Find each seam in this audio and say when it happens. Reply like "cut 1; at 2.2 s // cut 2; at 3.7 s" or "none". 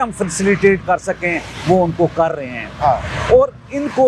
none